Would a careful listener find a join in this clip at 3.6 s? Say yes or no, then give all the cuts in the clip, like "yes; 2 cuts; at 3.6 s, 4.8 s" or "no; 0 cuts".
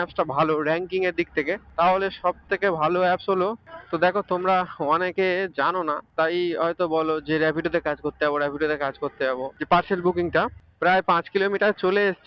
yes; 2 cuts; at 3.6 s, 9.5 s